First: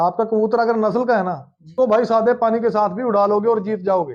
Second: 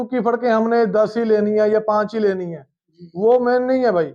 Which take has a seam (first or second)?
first